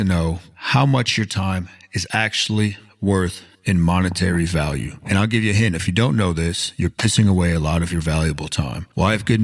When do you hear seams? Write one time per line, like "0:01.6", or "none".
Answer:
0:03.5